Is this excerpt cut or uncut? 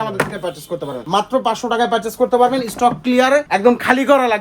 uncut